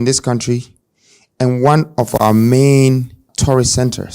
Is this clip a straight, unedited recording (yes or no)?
no